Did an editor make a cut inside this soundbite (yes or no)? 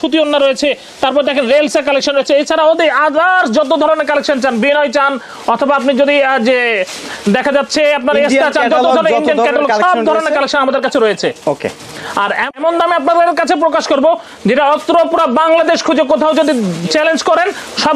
no